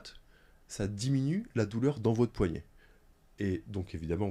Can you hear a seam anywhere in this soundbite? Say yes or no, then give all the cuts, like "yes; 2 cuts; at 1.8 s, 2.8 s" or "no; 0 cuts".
no; 0 cuts